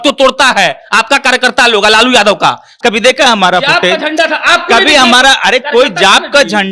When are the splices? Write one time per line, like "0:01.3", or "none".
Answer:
0:02.7